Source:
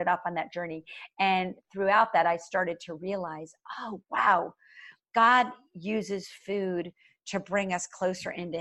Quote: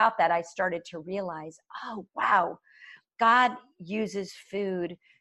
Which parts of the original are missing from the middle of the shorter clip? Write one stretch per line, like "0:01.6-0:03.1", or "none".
none